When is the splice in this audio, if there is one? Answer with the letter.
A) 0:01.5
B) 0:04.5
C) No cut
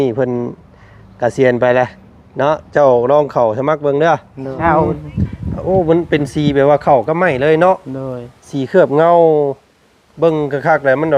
B